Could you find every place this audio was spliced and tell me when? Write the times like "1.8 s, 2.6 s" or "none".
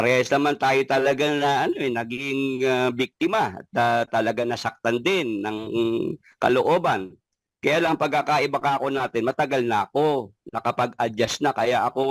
none

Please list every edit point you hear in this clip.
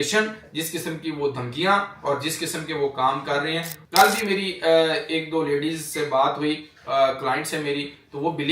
3.7 s

